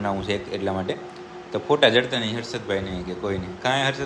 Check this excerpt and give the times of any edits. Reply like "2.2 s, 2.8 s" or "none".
none